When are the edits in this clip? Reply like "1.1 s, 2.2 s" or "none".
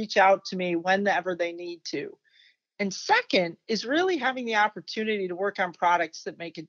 none